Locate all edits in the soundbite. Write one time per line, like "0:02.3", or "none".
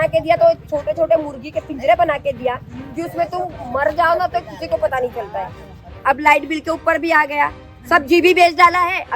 0:07.7